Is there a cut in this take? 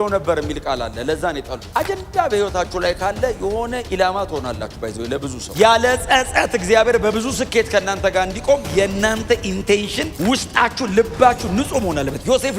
yes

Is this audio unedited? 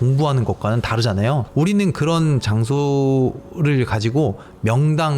no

